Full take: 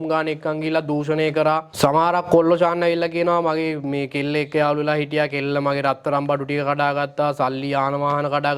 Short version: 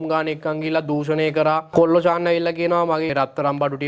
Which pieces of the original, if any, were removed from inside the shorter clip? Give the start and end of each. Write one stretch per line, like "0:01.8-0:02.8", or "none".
0:01.7-0:02.2
0:03.7-0:05.8